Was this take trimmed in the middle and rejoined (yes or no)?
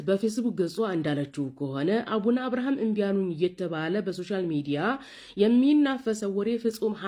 no